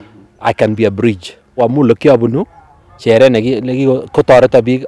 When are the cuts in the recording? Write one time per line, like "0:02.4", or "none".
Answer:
0:01.6

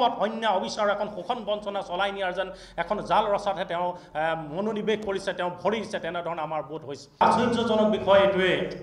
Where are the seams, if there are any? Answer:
0:07.2

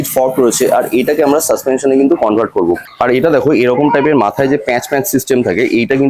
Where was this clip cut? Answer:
0:02.9

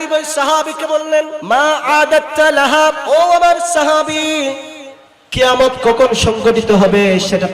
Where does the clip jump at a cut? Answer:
0:01.4
0:03.0

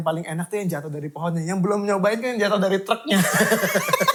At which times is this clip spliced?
none

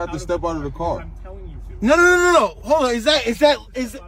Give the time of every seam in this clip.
none

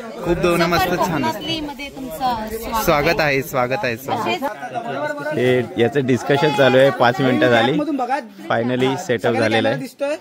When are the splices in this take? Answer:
0:04.5

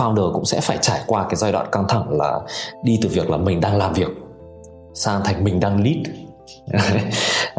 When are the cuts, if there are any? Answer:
none

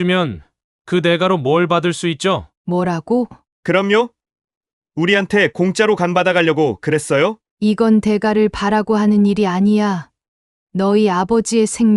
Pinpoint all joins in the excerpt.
0:02.5
0:03.4
0:07.5

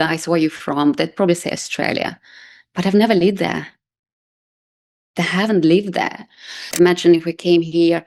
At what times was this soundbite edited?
0:06.7

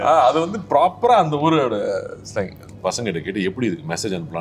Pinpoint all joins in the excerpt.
0:02.6

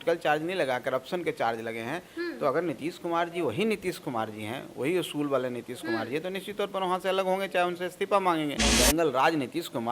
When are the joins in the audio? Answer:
0:08.6

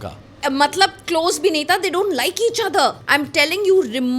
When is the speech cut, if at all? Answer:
0:03.0

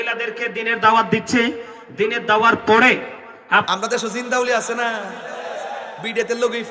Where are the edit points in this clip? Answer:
0:03.7

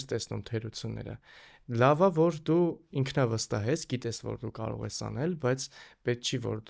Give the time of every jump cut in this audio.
none

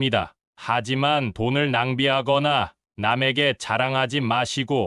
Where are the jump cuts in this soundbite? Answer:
none

